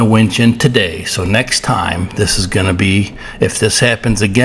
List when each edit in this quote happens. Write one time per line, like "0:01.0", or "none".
none